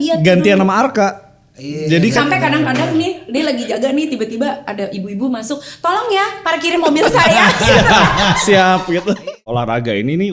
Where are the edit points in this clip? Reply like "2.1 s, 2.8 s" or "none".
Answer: 9.2 s